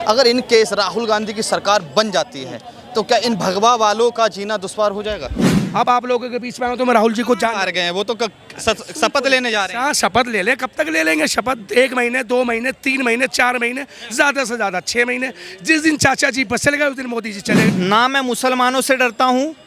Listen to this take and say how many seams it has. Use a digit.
2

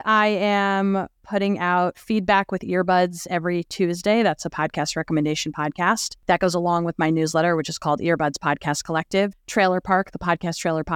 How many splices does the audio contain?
2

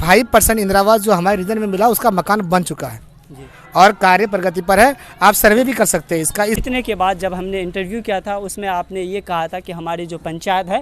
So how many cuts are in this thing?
1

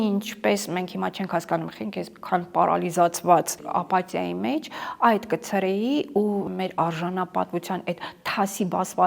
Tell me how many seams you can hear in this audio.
2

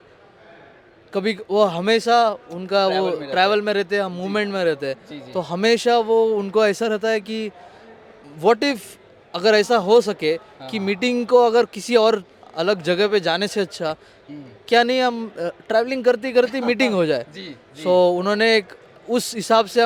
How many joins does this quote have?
0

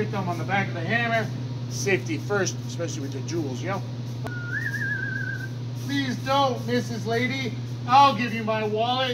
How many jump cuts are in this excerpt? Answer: 1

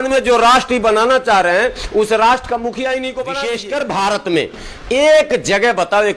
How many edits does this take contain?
1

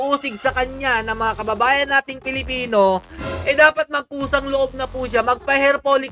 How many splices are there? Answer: 0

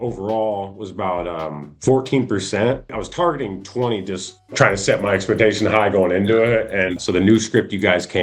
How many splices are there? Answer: 2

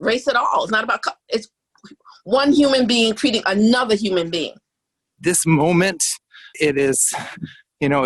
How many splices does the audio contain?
1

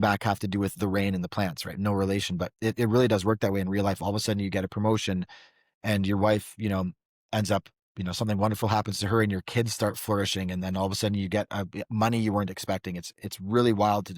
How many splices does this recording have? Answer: 0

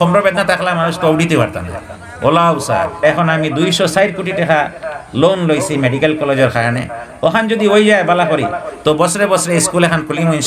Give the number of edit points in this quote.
1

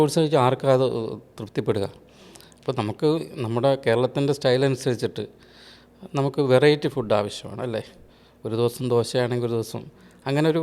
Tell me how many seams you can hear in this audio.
0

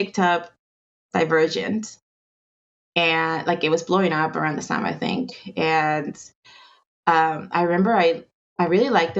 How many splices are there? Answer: 0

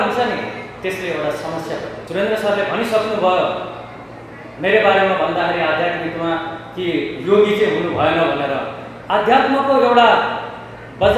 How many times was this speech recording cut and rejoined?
1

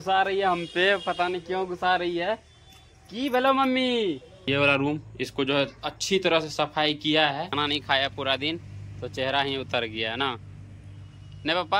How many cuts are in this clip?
2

